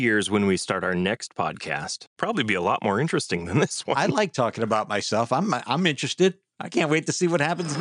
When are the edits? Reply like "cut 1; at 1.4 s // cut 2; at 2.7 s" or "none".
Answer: cut 1; at 2.1 s // cut 2; at 4.2 s

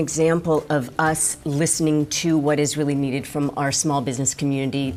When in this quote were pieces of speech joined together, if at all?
none

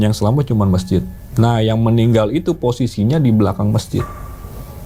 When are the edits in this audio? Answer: none

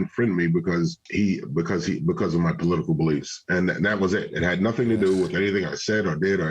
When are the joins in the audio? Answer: cut 1; at 1.0 s

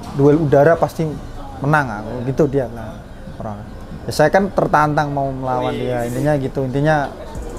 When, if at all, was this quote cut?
none

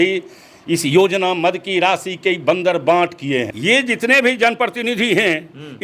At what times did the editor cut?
cut 1; at 3.5 s

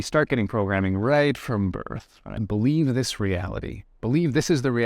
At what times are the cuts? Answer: cut 1; at 2.4 s

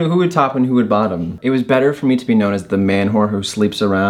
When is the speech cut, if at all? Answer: cut 1; at 1.4 s

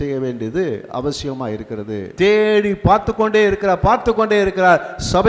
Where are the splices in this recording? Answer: cut 1; at 2.0 s

